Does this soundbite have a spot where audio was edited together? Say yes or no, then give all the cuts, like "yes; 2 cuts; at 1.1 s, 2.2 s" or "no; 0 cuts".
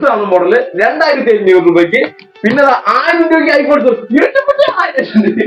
no; 0 cuts